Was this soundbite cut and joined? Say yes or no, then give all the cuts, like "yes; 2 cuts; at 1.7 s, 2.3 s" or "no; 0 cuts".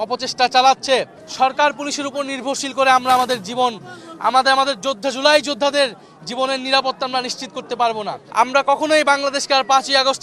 yes; 2 cuts; at 1.2 s, 8.2 s